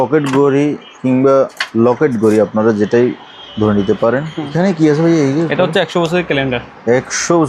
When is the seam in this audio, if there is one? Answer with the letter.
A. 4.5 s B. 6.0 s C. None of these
A